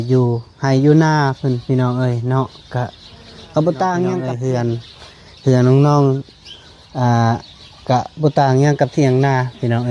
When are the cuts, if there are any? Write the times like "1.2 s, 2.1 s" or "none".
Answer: 4.3 s